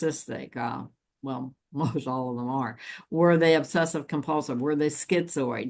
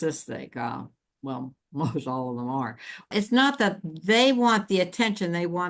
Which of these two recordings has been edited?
second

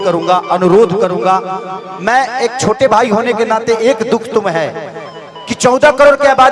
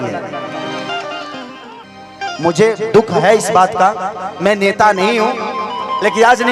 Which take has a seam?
second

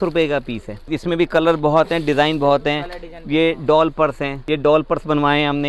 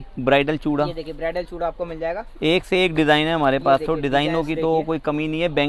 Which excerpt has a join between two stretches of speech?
first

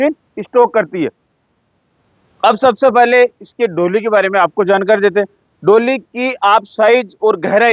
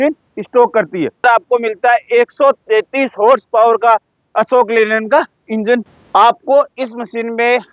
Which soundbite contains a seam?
second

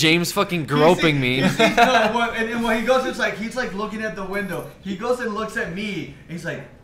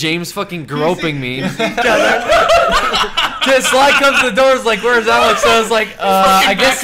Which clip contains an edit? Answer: first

